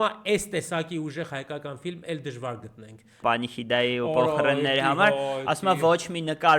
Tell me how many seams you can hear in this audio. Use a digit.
1